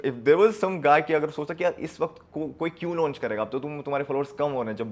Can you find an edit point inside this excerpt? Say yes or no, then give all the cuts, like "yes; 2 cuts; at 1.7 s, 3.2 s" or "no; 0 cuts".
no; 0 cuts